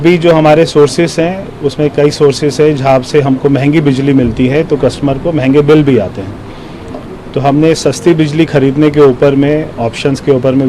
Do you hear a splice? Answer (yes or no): no